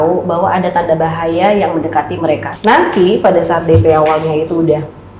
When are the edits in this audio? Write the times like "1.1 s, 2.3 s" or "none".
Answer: 2.5 s